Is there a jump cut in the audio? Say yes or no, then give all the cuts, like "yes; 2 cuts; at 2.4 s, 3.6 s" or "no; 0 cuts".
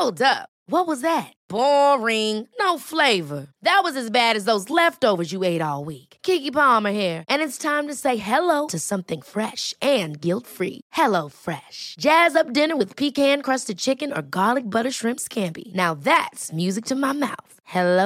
no; 0 cuts